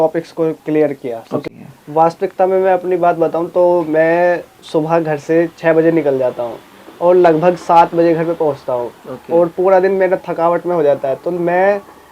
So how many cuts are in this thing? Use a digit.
1